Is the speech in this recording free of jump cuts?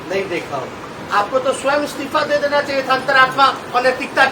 no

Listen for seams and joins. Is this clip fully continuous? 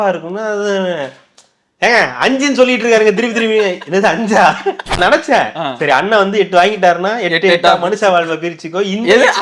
no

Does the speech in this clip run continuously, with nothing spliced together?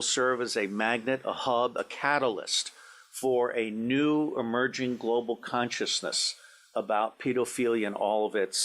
yes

